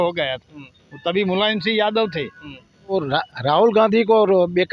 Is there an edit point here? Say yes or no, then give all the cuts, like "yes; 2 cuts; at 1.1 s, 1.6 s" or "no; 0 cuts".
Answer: yes; 1 cut; at 2.9 s